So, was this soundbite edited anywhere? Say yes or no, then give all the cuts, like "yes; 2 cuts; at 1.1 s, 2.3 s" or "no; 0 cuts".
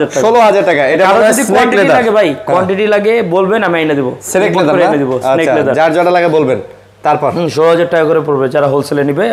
no; 0 cuts